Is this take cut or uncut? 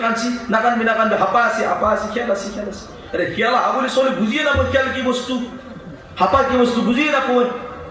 uncut